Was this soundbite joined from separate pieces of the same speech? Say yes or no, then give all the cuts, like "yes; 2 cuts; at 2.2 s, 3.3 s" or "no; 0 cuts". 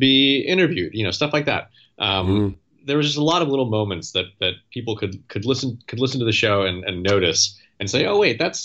no; 0 cuts